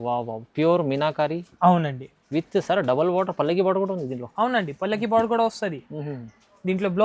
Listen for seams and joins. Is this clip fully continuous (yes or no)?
yes